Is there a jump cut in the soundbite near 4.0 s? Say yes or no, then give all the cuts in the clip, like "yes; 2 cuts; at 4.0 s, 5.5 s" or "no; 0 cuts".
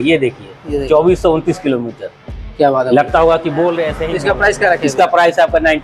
yes; 1 cut; at 4.0 s